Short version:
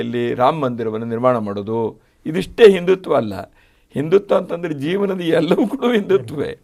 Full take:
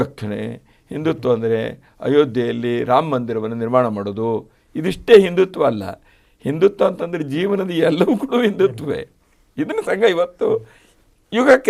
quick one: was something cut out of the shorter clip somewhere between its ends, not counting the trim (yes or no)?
no